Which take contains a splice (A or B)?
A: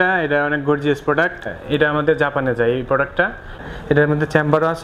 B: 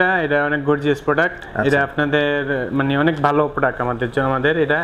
A